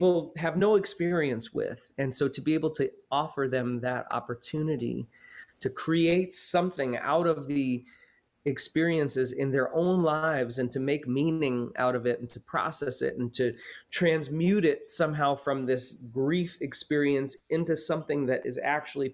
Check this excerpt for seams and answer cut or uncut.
uncut